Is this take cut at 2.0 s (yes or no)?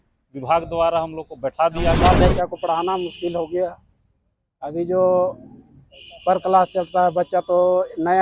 yes